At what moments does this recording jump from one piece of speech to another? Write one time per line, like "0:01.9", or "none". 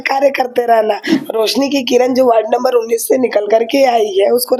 0:01.1